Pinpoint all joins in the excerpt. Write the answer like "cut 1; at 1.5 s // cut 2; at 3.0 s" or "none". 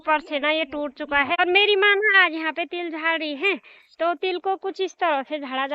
cut 1; at 1.4 s